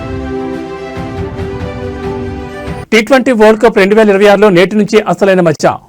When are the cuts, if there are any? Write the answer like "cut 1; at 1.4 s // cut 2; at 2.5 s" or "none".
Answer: cut 1; at 2.8 s